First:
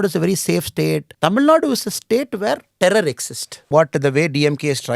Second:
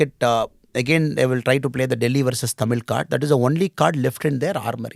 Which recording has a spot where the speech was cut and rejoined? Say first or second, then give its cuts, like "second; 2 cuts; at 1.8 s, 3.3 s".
first; 3 cuts; at 1.1 s, 2.7 s, 3.7 s